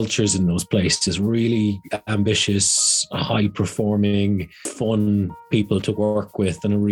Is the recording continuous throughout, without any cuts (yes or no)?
no